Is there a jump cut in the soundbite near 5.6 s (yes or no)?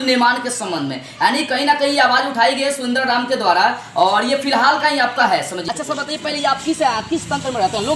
yes